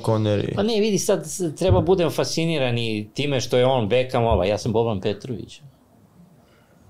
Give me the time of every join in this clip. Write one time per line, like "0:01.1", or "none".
none